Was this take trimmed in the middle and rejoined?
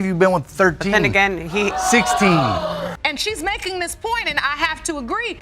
yes; 1 cut; at 3.0 s

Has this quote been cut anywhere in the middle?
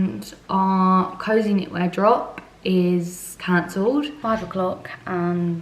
yes; 1 cut; at 4.1 s

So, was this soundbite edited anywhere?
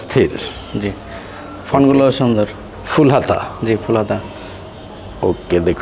no; 0 cuts

